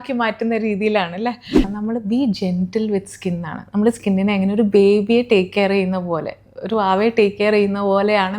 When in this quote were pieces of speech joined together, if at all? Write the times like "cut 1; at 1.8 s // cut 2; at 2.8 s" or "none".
cut 1; at 1.6 s

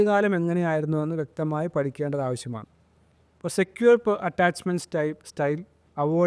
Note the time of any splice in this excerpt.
none

